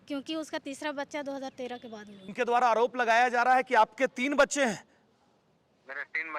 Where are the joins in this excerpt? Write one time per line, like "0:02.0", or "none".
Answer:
0:02.3